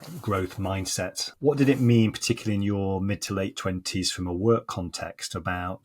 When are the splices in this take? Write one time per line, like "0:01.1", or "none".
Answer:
0:01.2